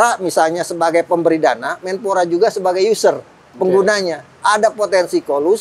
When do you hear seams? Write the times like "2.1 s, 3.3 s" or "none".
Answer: none